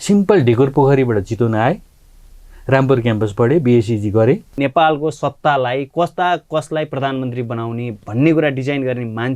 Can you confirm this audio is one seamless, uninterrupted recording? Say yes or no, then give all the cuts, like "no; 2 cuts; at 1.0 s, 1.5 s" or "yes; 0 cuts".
no; 1 cut; at 4.5 s